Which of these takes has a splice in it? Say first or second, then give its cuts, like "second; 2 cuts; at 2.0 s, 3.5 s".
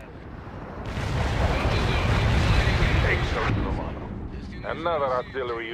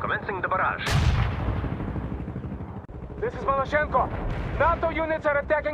second; 1 cut; at 2.9 s